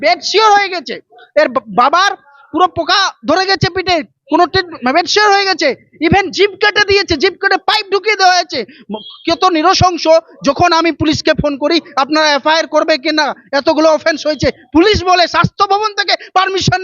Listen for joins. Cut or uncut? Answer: uncut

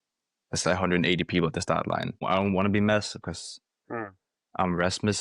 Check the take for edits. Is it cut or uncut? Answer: cut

